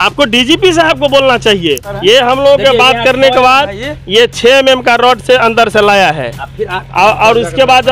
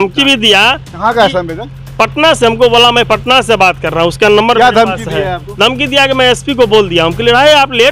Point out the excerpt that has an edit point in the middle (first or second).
first